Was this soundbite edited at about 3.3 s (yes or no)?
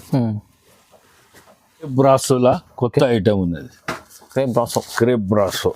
no